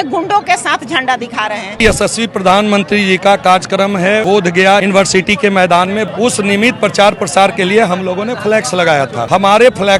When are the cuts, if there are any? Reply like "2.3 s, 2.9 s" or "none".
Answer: 1.8 s, 4.4 s, 6.0 s, 9.2 s